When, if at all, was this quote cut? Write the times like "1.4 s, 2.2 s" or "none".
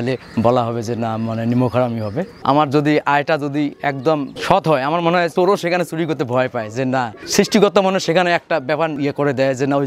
2.3 s, 4.3 s, 5.3 s, 7.2 s, 8.9 s